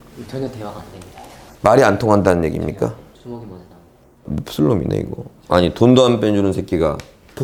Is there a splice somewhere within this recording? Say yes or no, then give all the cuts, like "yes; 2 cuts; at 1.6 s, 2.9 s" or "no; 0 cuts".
no; 0 cuts